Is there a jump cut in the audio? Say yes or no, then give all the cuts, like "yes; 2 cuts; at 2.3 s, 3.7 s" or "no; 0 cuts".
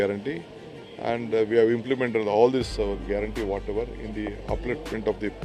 no; 0 cuts